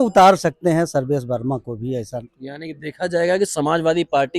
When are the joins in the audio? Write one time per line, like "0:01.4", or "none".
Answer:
none